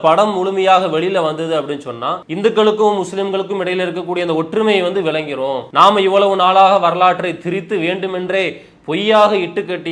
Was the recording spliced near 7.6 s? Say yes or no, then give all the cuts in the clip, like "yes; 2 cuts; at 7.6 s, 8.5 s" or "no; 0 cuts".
no; 2 cuts; at 2.2 s, 5.6 s